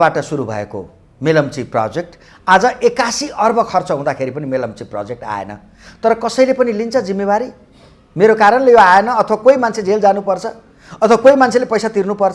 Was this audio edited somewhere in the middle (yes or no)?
no